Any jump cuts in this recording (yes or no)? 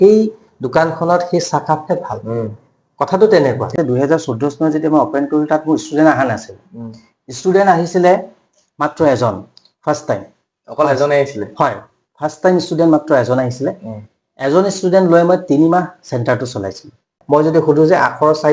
yes